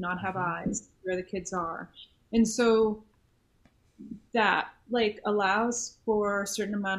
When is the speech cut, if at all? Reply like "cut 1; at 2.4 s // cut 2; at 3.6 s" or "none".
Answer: none